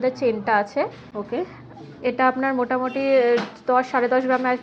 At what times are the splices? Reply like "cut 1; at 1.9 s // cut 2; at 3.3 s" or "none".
none